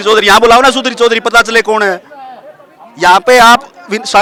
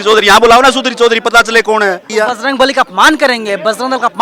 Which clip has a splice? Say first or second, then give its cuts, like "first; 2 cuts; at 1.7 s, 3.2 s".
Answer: second; 1 cut; at 2.1 s